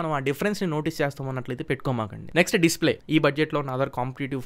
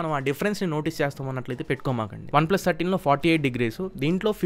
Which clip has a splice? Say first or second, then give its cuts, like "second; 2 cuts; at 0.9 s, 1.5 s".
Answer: second; 1 cut; at 2.2 s